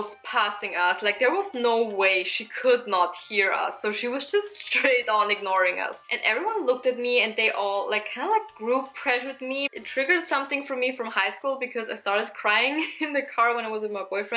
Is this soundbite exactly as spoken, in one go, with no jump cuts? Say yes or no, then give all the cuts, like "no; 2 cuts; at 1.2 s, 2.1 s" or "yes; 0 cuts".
no; 2 cuts; at 6.0 s, 9.7 s